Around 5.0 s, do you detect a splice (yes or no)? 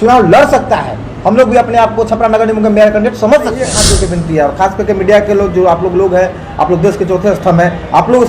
no